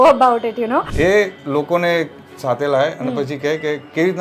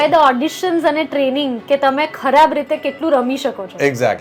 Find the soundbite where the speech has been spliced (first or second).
first